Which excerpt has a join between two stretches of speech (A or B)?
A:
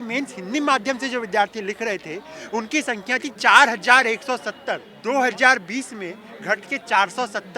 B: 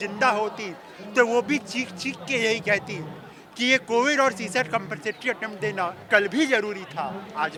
A